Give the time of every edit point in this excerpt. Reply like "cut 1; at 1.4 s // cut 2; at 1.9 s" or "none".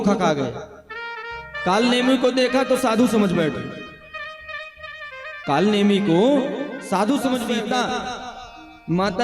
cut 1; at 7.6 s

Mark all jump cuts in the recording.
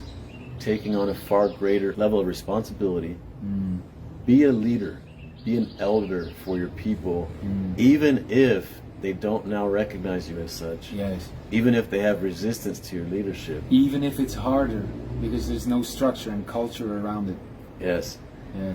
cut 1; at 1.9 s

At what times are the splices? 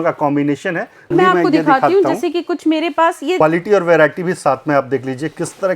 cut 1; at 1.1 s // cut 2; at 3.4 s

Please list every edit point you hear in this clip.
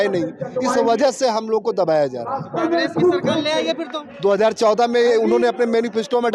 none

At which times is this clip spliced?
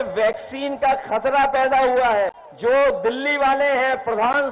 cut 1; at 2.4 s

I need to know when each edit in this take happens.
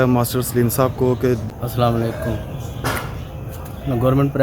cut 1; at 1.5 s

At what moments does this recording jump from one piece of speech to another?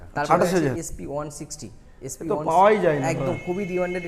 none

